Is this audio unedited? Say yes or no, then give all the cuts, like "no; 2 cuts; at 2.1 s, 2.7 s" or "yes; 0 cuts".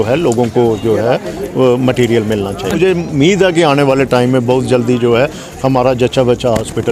no; 1 cut; at 2.7 s